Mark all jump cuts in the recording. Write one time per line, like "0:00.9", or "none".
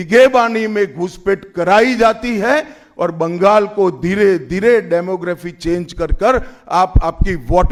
none